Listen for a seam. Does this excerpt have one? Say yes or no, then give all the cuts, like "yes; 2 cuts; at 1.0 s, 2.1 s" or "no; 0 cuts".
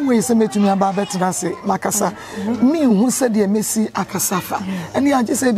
no; 0 cuts